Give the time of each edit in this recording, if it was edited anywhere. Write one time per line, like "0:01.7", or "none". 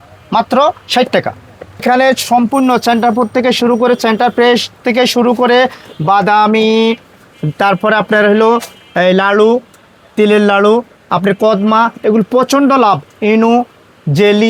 none